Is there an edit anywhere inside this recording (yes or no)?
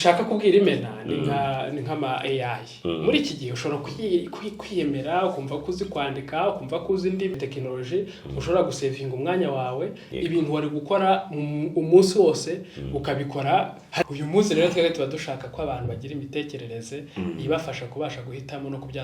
yes